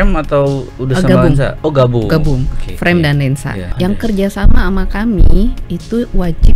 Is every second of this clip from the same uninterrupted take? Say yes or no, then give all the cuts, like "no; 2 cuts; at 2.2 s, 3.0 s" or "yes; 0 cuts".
no; 1 cut; at 3.6 s